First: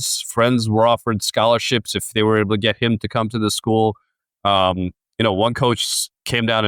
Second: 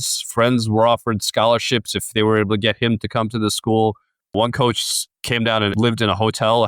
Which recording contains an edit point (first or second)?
second